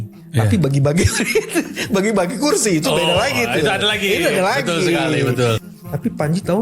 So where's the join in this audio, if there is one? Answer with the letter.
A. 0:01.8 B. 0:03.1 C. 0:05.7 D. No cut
C